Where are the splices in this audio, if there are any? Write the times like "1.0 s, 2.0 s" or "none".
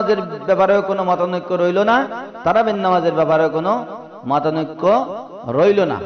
none